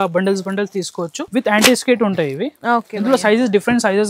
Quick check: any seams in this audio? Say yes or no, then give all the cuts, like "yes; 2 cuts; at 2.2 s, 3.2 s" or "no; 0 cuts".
yes; 1 cut; at 1.2 s